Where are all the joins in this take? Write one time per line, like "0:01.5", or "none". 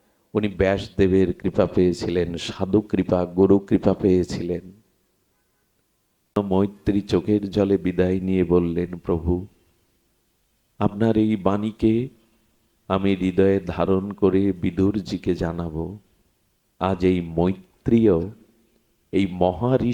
0:06.4